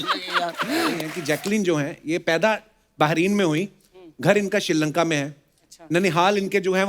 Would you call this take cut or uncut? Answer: cut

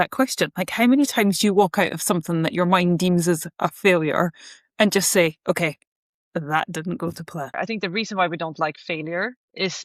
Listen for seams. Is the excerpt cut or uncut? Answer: cut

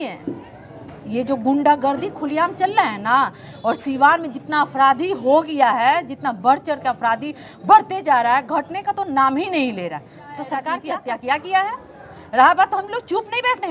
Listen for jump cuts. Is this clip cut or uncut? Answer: cut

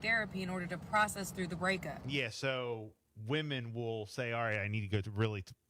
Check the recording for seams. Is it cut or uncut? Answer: uncut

